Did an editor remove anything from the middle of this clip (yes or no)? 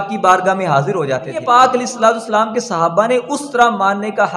no